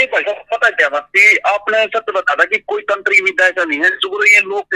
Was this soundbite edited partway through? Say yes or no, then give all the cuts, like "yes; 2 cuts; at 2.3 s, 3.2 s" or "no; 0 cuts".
no; 0 cuts